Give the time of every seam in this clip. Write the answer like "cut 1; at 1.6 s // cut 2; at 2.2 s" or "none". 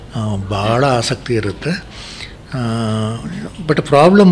none